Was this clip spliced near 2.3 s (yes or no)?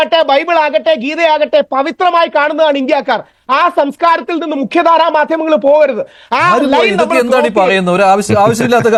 no